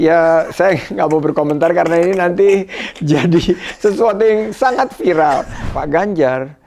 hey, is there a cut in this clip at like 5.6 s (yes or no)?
yes